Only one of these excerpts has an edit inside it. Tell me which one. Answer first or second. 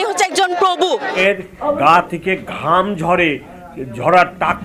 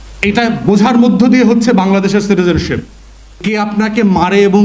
first